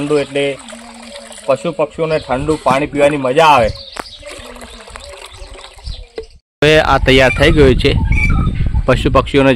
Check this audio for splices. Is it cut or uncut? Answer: cut